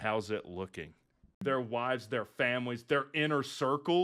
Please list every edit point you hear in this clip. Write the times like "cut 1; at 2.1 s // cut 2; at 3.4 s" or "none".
cut 1; at 1.4 s